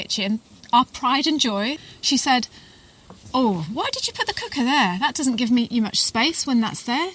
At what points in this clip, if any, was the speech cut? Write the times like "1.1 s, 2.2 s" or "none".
1.8 s